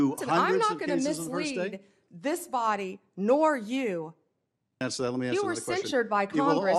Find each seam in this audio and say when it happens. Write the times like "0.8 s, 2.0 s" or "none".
4.8 s